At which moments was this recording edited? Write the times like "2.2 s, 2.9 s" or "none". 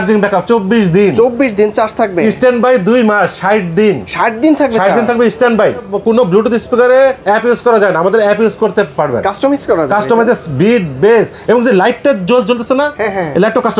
5.9 s